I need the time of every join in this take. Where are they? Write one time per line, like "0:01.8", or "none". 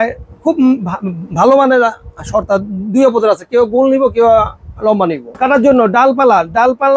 0:05.2